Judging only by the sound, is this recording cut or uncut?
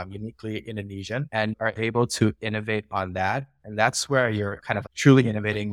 uncut